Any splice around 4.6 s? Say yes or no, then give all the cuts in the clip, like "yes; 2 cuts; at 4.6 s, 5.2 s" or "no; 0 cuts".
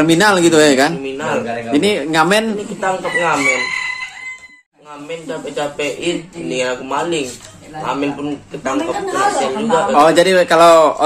yes; 1 cut; at 4.6 s